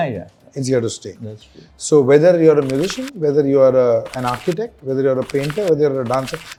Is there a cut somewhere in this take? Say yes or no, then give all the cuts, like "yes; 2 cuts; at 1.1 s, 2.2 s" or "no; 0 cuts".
no; 0 cuts